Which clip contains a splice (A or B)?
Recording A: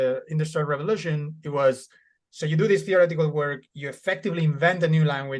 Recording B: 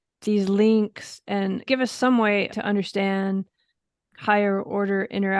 B